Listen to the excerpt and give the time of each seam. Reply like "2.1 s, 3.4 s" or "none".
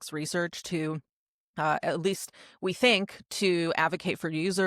none